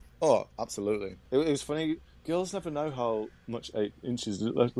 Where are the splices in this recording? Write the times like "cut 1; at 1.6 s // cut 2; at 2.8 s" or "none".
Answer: cut 1; at 1.2 s